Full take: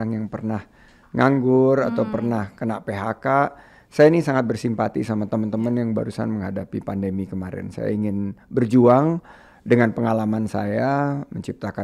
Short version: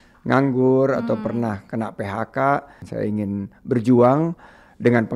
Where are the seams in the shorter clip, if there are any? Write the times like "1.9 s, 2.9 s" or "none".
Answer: 2.8 s